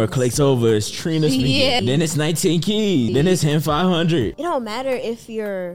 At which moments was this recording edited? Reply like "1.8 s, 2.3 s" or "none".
1.8 s, 3.1 s, 4.3 s